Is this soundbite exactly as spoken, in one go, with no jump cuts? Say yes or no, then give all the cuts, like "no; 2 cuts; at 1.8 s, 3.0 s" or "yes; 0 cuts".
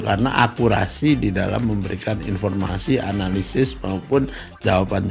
yes; 0 cuts